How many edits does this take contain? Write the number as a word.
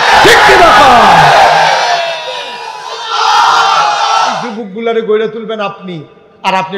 one